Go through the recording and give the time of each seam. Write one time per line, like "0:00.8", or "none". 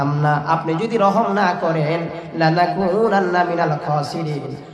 none